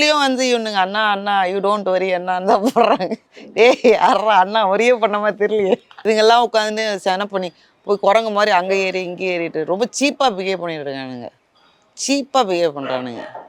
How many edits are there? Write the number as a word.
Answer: one